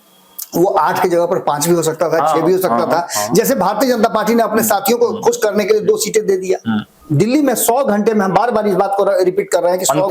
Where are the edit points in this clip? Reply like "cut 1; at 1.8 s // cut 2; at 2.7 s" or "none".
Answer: cut 1; at 7.0 s